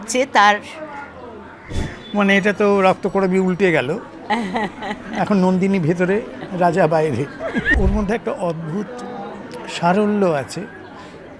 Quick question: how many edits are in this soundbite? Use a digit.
2